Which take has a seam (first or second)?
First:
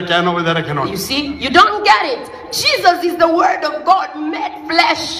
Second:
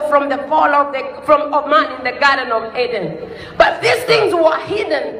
first